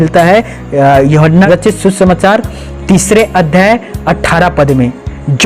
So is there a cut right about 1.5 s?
yes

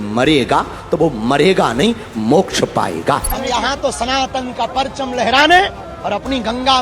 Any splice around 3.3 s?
yes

